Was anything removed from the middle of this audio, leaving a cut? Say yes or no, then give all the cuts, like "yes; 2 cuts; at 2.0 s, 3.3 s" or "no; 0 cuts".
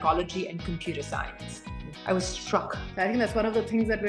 yes; 1 cut; at 2.8 s